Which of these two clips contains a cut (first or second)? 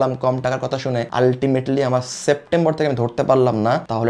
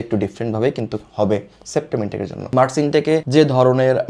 second